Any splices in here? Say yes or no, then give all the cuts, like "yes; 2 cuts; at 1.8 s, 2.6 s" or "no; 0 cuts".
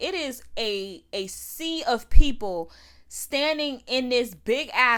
no; 0 cuts